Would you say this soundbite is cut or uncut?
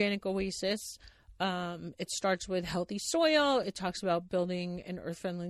uncut